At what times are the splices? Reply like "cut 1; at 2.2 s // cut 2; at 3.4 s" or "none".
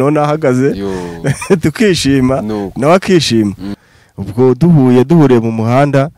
cut 1; at 3.8 s